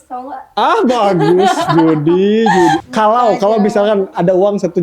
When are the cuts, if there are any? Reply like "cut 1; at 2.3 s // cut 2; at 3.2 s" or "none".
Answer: cut 1; at 2.8 s